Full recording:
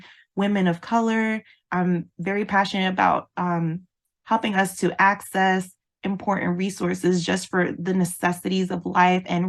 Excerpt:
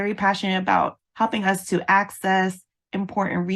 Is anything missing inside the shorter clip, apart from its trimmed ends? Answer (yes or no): yes